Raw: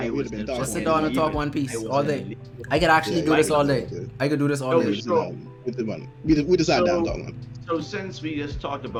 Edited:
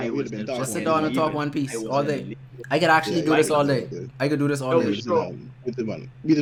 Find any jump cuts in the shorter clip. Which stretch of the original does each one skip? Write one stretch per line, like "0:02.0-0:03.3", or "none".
none